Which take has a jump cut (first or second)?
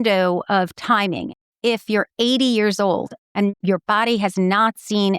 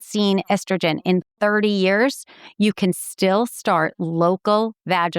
first